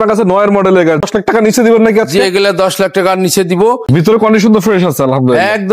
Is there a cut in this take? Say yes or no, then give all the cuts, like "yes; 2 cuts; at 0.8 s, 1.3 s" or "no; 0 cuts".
yes; 2 cuts; at 1.0 s, 3.9 s